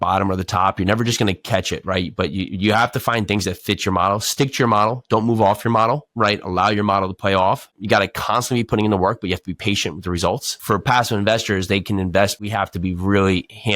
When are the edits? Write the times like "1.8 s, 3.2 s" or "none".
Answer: 10.5 s, 12.4 s